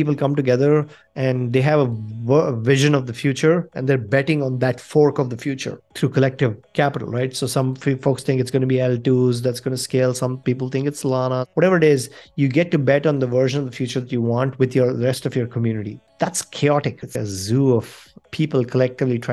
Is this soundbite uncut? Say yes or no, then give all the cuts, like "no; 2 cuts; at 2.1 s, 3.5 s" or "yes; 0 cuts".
no; 2 cuts; at 11.5 s, 16.0 s